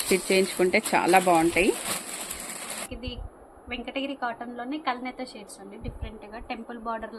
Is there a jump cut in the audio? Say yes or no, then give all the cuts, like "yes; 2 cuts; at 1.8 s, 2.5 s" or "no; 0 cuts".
yes; 1 cut; at 2.9 s